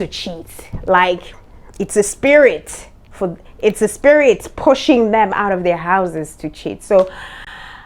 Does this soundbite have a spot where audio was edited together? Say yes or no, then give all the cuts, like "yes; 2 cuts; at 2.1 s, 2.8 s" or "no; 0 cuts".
no; 0 cuts